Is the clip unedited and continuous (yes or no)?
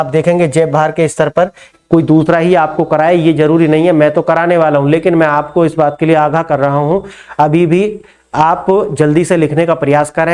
no